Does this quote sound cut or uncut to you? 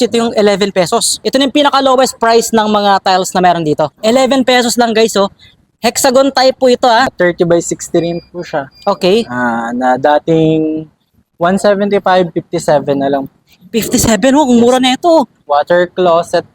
cut